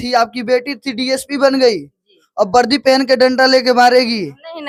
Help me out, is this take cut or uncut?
uncut